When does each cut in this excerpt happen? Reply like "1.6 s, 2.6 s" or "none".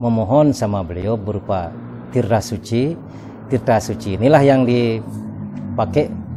none

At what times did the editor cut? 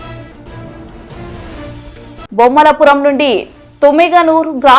2.2 s

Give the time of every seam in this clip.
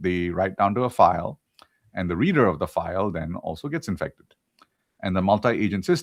2.3 s

